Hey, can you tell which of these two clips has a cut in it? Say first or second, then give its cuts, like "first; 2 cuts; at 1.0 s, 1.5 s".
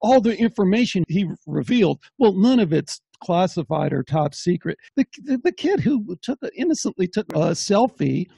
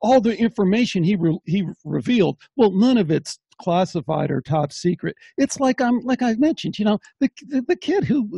first; 3 cuts; at 1.0 s, 4.8 s, 7.3 s